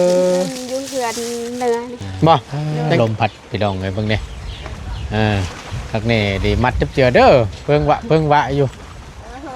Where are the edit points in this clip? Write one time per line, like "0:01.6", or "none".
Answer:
0:03.0